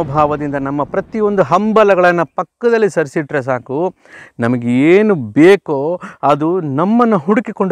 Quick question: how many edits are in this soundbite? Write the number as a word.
zero